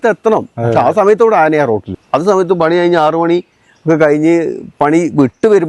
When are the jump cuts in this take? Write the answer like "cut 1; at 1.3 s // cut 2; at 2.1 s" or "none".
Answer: cut 1; at 1.9 s